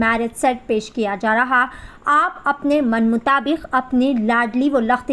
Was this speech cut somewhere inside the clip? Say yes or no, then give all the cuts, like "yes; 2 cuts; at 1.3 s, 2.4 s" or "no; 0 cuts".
no; 0 cuts